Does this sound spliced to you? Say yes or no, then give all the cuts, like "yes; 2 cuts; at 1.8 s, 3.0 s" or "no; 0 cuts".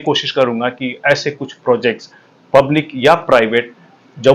no; 0 cuts